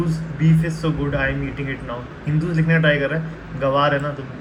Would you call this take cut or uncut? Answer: uncut